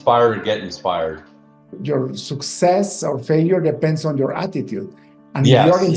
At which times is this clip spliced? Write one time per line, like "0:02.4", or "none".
0:01.8